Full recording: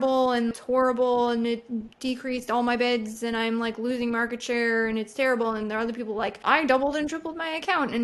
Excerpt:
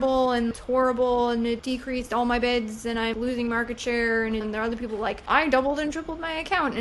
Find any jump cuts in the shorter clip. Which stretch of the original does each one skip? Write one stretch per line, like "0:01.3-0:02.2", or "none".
0:01.6-0:02.0
0:03.5-0:03.7
0:05.1-0:05.6